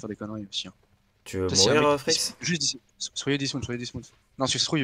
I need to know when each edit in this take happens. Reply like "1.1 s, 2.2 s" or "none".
none